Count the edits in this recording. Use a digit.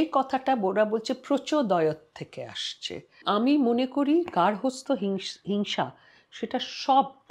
1